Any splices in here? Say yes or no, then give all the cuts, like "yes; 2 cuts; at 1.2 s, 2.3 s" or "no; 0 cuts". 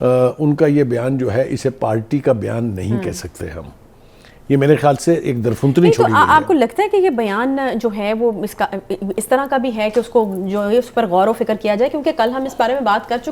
no; 0 cuts